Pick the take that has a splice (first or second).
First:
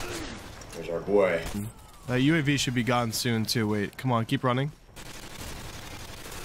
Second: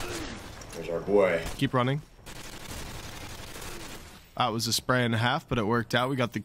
second